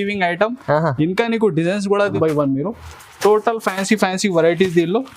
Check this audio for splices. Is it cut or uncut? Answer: cut